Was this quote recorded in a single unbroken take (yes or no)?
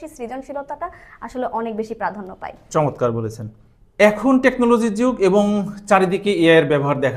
yes